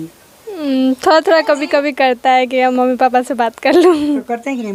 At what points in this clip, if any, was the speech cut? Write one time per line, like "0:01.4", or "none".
none